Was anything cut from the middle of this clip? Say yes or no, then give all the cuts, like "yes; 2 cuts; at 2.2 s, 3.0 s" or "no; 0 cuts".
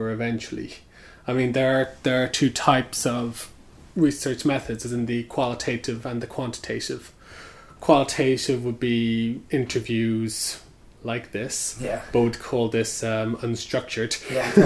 no; 0 cuts